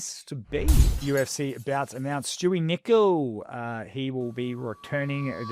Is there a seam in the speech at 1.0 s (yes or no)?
yes